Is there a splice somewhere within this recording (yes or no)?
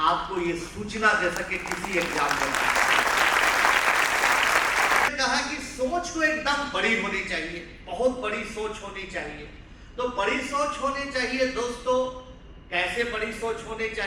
yes